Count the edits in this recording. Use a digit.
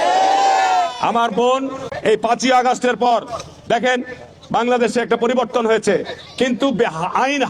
1